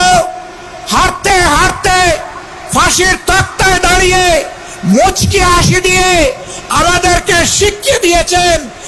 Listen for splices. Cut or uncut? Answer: uncut